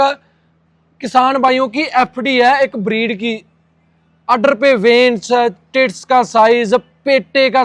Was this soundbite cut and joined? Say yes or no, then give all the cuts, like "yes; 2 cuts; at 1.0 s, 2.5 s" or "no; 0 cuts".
no; 0 cuts